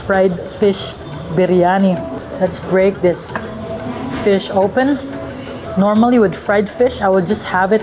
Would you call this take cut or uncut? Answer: cut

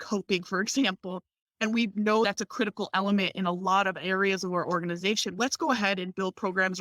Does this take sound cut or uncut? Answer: uncut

